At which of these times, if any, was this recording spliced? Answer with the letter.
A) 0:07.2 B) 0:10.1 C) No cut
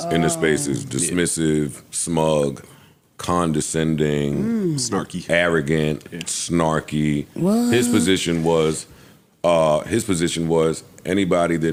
C